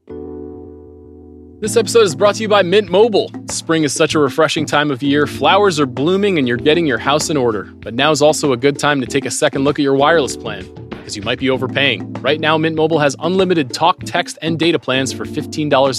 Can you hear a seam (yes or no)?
yes